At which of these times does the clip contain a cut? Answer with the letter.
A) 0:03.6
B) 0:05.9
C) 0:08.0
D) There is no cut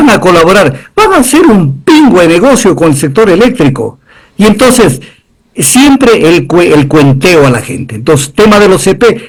D